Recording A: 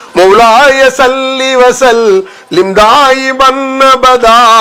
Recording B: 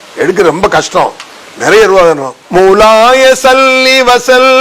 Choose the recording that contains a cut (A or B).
B